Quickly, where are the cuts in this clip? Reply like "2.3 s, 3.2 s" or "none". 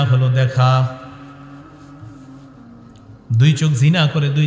1.0 s, 3.2 s